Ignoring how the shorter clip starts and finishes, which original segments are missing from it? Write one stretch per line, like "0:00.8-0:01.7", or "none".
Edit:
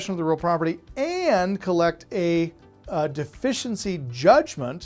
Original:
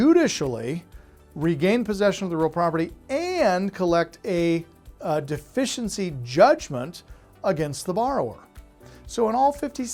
none